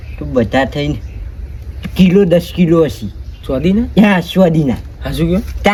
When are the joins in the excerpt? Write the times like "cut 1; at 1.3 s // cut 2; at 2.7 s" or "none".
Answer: none

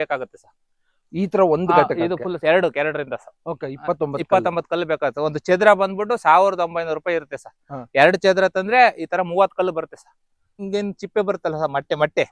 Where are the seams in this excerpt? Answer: cut 1; at 10.6 s

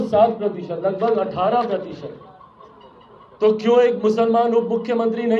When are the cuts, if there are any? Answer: none

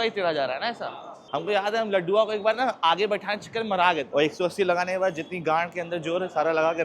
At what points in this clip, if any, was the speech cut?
cut 1; at 1.1 s // cut 2; at 4.1 s

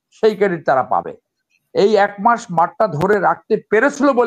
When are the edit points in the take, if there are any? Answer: none

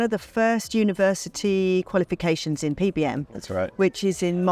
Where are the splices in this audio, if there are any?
none

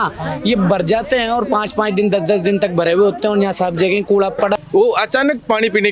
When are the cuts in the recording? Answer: cut 1; at 4.6 s

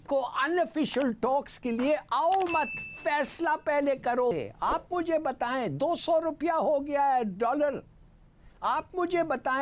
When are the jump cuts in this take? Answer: cut 1; at 4.3 s

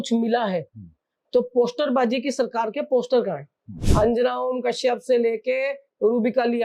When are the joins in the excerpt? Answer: cut 1; at 3.8 s

